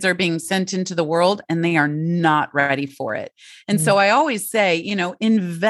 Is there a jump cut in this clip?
no; 0 cuts

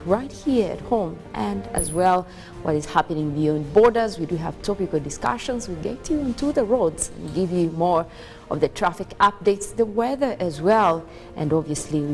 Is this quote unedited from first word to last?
yes; 0 cuts

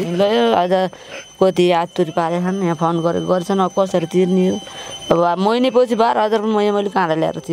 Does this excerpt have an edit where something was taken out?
no; 0 cuts

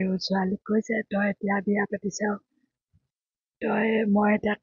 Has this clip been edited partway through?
no; 0 cuts

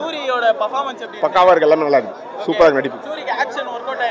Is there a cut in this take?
no; 0 cuts

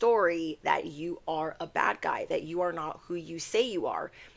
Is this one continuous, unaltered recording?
yes; 0 cuts

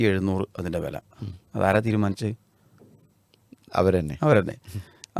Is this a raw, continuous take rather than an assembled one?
yes; 0 cuts

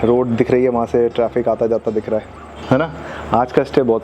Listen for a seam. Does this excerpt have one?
no; 0 cuts

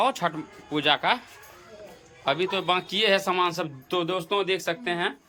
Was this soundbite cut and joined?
no; 0 cuts

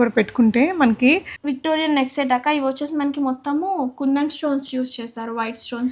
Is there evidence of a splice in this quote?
yes; 1 cut; at 1.3 s

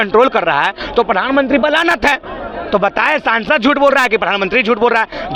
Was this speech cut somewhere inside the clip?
no; 0 cuts

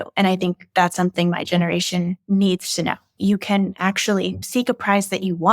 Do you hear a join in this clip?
yes; 2 cuts; at 3.2 s, 4.4 s

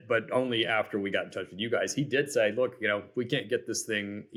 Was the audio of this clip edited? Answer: no; 0 cuts

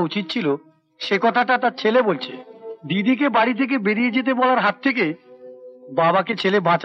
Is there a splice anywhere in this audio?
no; 0 cuts

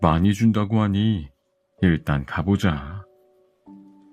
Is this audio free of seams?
no; 1 cut; at 3.2 s

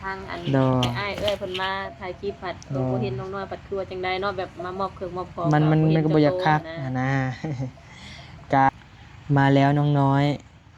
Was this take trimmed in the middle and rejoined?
yes; 1 cut; at 8.7 s

